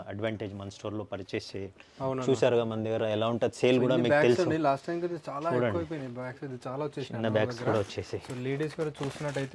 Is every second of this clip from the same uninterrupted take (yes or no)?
yes